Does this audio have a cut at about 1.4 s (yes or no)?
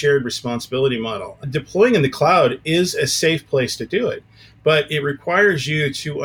yes